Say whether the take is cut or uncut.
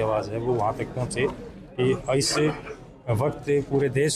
uncut